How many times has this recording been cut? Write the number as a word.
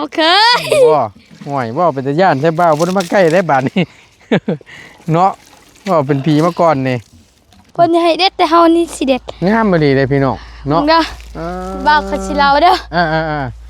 one